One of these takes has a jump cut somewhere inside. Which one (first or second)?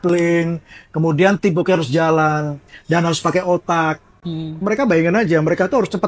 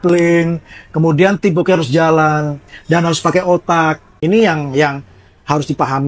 second